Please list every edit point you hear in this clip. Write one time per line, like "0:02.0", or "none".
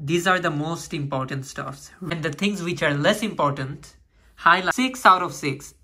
0:02.1
0:04.7